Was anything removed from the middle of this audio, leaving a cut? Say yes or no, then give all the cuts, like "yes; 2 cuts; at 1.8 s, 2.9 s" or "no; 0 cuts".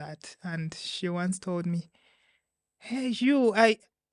no; 0 cuts